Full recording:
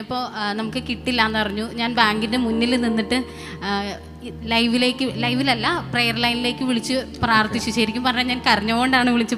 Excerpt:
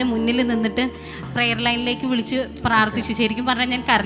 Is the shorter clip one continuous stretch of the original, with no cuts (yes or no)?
no